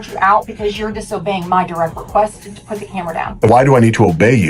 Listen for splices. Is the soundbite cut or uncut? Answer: cut